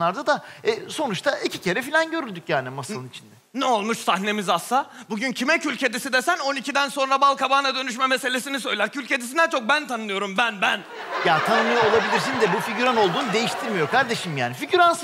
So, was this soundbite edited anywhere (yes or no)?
yes